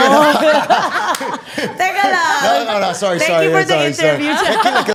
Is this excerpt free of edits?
yes; 0 cuts

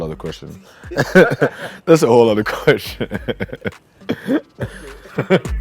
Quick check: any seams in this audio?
no; 0 cuts

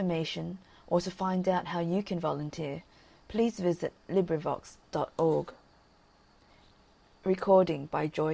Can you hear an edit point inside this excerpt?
yes; 1 cut; at 6.1 s

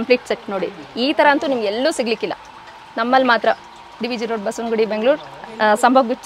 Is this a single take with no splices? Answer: yes; 0 cuts

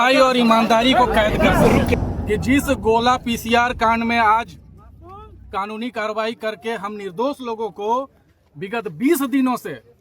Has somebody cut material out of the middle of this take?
yes; 1 cut; at 1.9 s

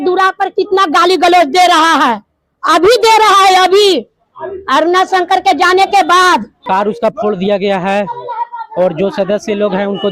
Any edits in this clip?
yes; 1 cut; at 6.5 s

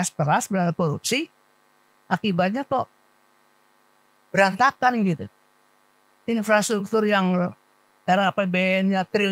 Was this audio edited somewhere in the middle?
no; 0 cuts

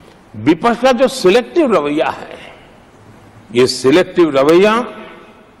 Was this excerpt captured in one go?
yes; 0 cuts

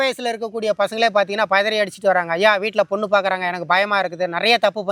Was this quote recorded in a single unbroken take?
yes; 0 cuts

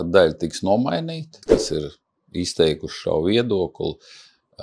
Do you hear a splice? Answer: yes; 1 cut; at 1.4 s

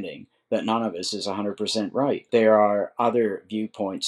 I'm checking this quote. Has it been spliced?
yes; 1 cut; at 2.3 s

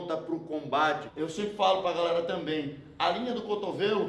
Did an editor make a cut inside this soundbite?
yes; 1 cut; at 1.1 s

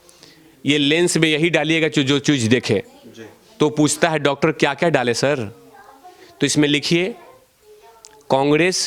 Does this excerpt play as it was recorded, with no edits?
yes; 0 cuts

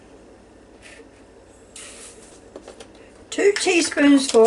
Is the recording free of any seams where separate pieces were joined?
no; 1 cut; at 2.3 s

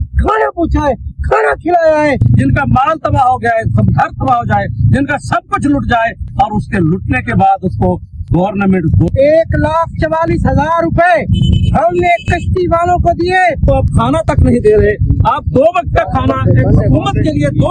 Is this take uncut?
no; 3 cuts; at 2.2 s, 9.1 s, 13.6 s

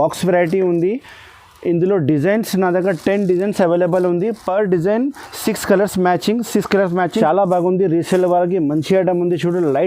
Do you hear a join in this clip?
yes; 1 cut; at 7.2 s

